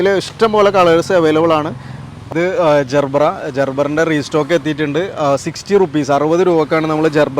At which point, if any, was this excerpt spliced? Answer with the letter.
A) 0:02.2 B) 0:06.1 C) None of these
A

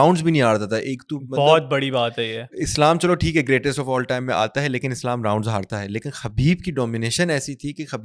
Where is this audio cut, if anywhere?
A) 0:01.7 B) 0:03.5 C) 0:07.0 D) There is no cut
D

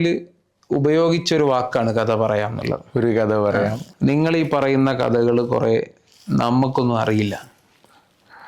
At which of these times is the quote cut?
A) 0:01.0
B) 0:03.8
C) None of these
B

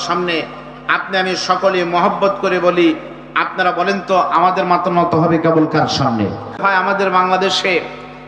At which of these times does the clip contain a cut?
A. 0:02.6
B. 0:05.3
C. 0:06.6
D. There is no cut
C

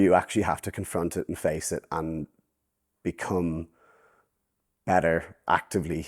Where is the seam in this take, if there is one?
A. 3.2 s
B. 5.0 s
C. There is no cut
C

